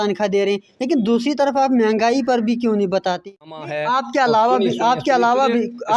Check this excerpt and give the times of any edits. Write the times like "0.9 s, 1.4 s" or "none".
3.4 s

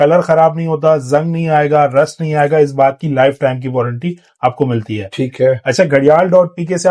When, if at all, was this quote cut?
none

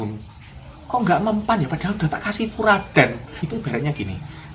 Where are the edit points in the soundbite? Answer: 3.4 s

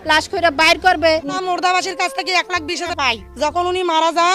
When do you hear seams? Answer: 1.3 s

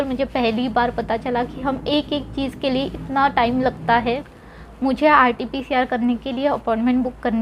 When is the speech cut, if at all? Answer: none

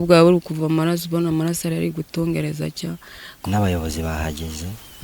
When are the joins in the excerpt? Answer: 3.4 s

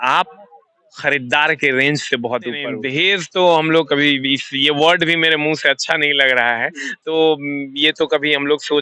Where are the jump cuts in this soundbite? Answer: 2.7 s

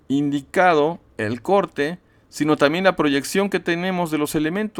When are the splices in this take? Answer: none

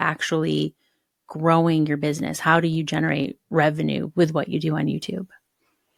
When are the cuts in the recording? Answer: none

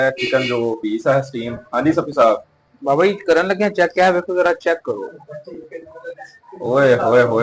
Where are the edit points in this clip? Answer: none

